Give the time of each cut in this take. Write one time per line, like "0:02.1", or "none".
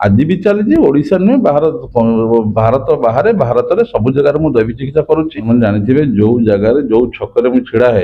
0:05.5